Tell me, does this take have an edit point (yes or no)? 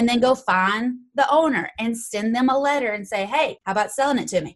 yes